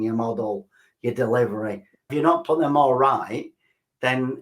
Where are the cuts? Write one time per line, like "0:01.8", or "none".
0:02.1